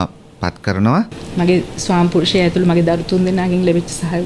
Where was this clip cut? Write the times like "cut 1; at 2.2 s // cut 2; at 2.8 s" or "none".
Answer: cut 1; at 1.2 s